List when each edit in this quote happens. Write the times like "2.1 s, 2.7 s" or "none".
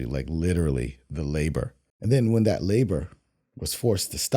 1.8 s